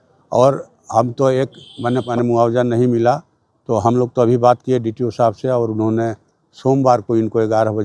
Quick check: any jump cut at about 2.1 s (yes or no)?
yes